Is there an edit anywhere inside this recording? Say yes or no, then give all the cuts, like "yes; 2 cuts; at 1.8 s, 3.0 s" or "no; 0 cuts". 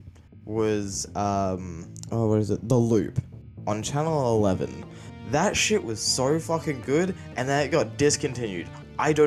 no; 0 cuts